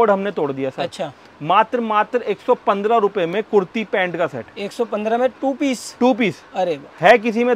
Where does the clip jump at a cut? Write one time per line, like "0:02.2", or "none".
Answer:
none